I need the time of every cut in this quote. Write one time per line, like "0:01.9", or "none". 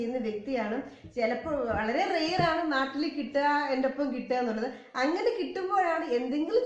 0:02.9